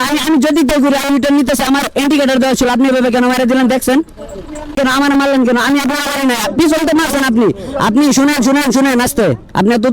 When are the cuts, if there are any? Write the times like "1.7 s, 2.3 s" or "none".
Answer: 4.8 s